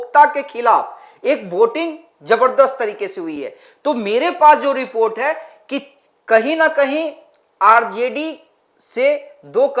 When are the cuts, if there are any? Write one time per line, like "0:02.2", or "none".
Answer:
none